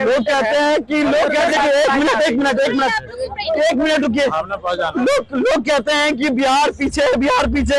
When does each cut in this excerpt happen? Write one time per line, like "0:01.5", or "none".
0:01.5